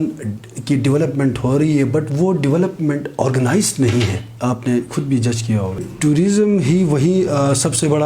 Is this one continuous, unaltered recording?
no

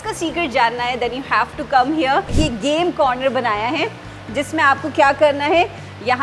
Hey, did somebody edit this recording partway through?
yes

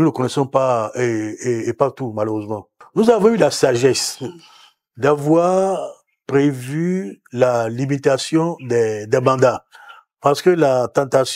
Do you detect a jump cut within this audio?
yes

